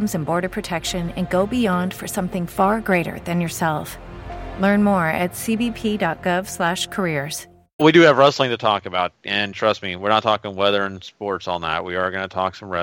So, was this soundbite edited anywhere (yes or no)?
no